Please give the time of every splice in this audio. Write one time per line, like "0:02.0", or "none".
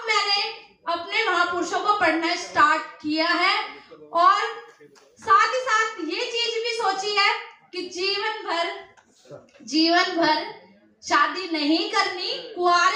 none